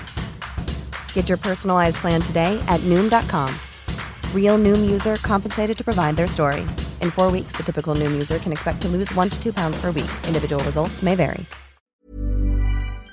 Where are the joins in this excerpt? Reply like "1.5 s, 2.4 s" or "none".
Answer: 12.0 s